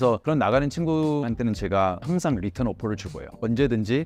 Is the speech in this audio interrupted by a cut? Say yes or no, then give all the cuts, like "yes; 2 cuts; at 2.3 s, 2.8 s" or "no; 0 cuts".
no; 0 cuts